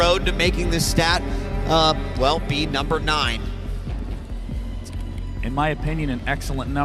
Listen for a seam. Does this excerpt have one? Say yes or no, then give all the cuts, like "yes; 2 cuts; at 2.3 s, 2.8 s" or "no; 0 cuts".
yes; 1 cut; at 2.9 s